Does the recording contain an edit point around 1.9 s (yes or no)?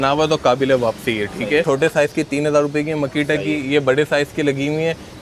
yes